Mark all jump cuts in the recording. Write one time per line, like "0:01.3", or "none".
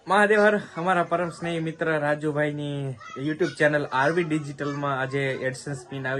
none

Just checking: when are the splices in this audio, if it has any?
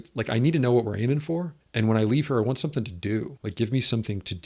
0:01.6
0:03.4

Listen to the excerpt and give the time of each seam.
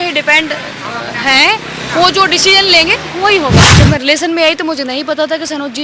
0:03.7

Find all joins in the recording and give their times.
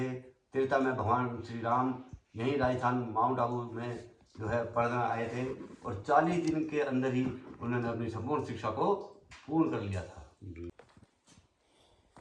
0:10.7

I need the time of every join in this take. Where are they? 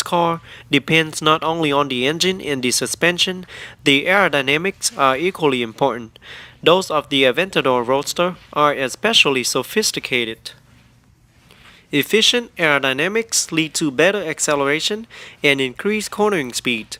none

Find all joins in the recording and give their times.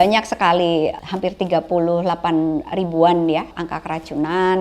0:01.0
0:03.5

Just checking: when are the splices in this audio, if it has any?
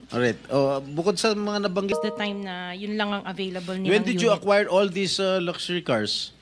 0:01.9

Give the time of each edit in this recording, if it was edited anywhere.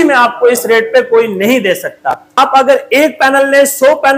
0:02.4

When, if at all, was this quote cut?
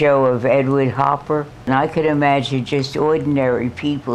0:01.7

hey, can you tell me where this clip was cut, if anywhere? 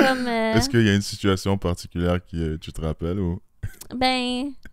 none

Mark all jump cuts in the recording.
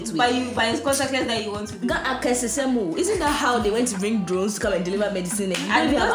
none

